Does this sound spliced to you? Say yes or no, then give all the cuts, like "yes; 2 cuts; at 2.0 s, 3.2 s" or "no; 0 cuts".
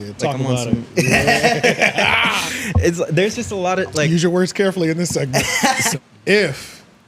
yes; 1 cut; at 5.9 s